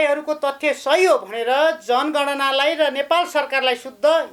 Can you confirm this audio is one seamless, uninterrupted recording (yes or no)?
yes